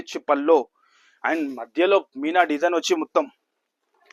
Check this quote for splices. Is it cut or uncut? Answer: uncut